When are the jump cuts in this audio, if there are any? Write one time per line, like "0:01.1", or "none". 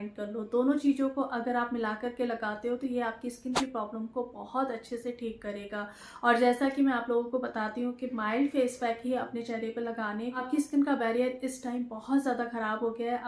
none